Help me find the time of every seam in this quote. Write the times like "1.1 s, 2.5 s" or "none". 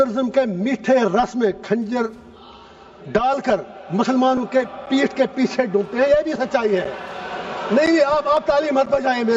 none